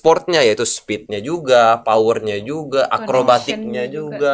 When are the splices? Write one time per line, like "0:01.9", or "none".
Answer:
none